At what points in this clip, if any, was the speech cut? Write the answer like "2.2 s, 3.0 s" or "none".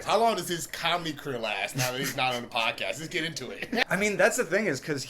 3.8 s